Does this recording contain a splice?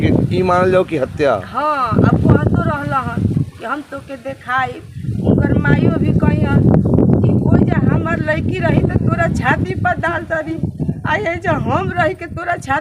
no; 0 cuts

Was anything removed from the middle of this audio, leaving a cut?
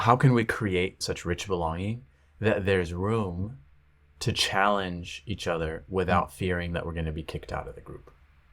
yes; 1 cut; at 1.0 s

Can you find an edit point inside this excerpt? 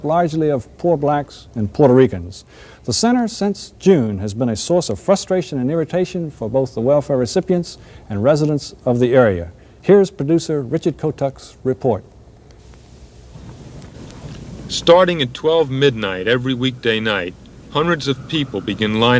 yes; 1 cut; at 7.3 s

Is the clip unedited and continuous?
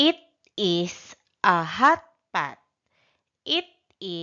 no; 1 cut; at 2.1 s

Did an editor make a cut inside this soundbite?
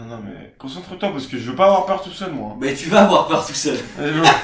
no; 0 cuts

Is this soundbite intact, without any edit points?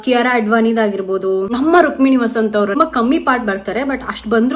no; 1 cut; at 2.7 s

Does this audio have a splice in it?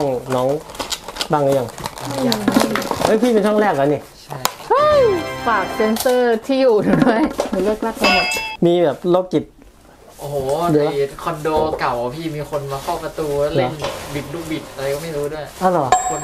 yes; 2 cuts; at 5.4 s, 8.2 s

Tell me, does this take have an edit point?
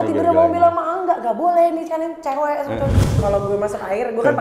yes; 1 cut; at 3.2 s

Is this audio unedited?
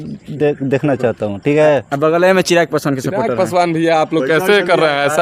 yes; 0 cuts

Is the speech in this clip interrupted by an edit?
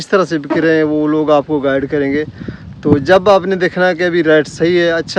no; 0 cuts

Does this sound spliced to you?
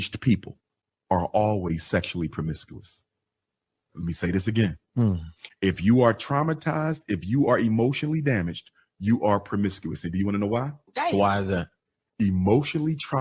no; 0 cuts

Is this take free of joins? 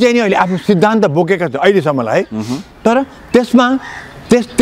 yes; 0 cuts

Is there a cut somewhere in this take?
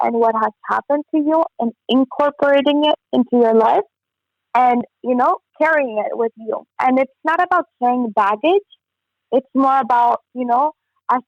no; 0 cuts

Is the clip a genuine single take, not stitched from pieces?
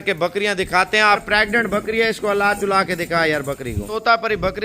no; 2 cuts; at 1.2 s, 3.9 s

